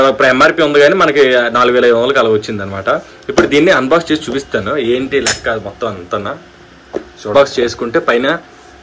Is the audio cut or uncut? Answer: cut